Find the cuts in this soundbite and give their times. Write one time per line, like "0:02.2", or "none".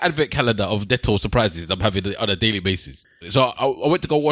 0:03.0

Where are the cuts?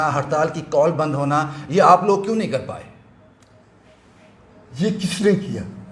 none

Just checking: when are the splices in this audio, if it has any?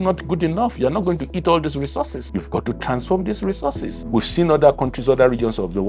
0:02.3
0:03.9

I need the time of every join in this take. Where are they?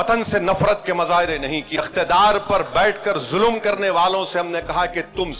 0:01.7

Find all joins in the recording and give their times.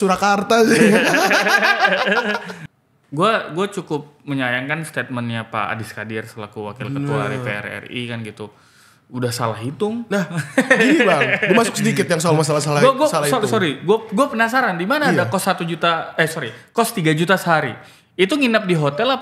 0:02.5

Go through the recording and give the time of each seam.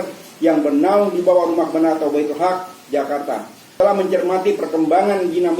0:03.8

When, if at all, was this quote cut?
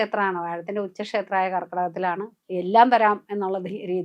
0:02.3

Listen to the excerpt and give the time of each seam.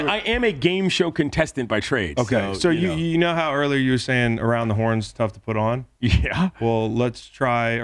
none

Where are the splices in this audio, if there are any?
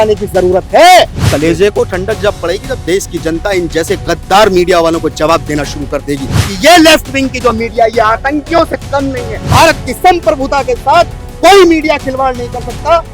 0:01.2
0:06.4
0:09.5

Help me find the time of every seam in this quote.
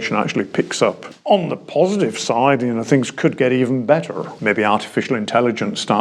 0:01.1
0:04.3

